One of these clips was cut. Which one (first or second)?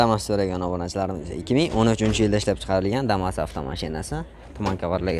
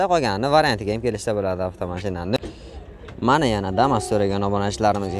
second